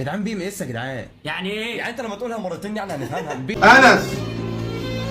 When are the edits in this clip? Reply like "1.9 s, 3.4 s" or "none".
3.6 s